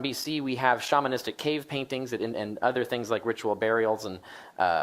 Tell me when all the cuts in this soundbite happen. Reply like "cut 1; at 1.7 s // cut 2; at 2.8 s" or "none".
cut 1; at 2.8 s